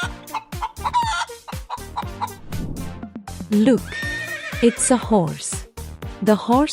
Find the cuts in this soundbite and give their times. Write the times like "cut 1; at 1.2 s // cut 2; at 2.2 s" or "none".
cut 1; at 1.9 s